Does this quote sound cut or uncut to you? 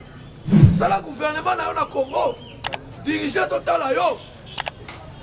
uncut